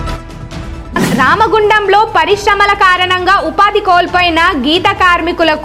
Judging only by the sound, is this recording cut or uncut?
uncut